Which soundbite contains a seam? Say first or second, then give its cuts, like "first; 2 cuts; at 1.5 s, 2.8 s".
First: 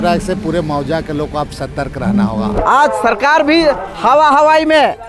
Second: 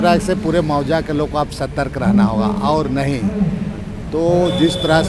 first; 1 cut; at 2.6 s